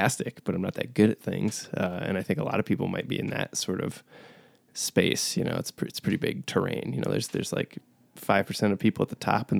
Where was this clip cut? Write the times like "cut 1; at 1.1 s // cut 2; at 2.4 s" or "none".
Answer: none